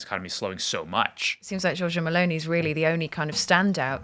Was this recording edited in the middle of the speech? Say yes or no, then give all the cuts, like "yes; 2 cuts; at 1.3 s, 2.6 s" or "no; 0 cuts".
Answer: yes; 1 cut; at 1.5 s